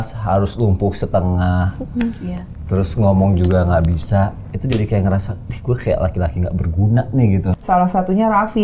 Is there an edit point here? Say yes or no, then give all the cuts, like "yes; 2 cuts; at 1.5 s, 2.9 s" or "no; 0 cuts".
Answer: yes; 1 cut; at 7.6 s